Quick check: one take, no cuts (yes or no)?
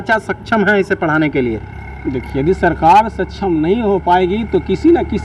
yes